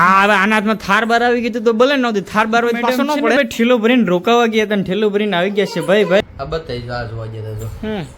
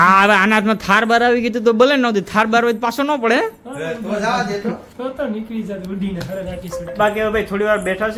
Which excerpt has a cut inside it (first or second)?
first